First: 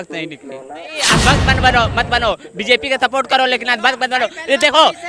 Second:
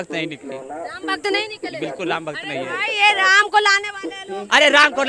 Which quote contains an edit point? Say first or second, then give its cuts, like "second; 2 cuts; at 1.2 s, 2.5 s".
first; 1 cut; at 1.0 s